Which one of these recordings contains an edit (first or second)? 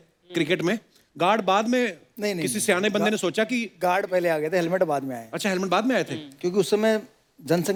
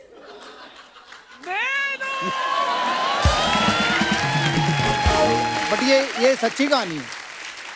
second